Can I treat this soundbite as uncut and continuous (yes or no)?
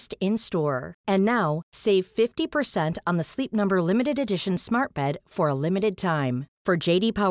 yes